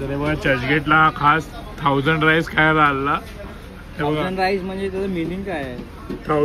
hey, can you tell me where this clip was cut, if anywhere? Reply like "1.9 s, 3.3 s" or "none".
none